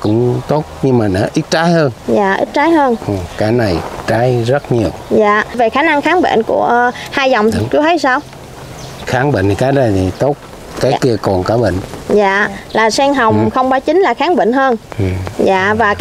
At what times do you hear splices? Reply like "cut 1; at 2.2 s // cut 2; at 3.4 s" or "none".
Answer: none